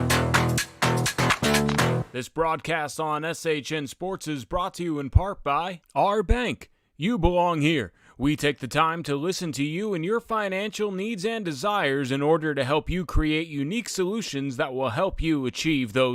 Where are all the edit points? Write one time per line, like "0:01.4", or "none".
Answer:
0:02.2

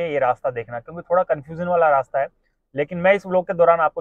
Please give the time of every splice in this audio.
none

